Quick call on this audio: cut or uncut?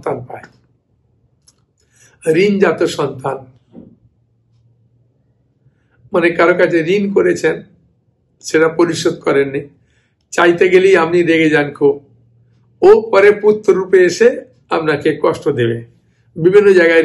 uncut